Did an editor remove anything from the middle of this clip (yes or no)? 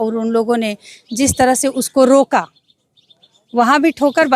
no